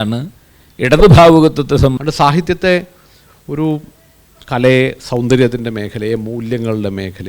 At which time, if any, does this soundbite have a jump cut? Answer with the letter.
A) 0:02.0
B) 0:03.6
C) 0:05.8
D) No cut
A